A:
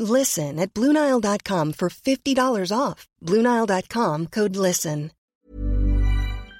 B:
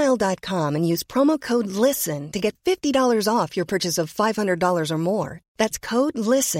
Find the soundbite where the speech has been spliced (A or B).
A